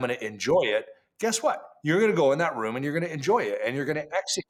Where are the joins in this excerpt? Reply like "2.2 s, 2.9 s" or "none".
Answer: none